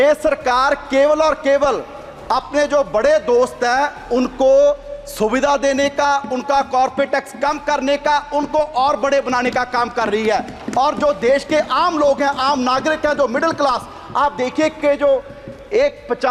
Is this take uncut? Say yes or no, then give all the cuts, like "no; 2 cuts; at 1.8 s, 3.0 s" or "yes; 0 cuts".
yes; 0 cuts